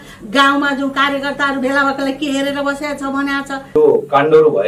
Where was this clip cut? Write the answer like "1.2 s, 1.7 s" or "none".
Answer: 3.7 s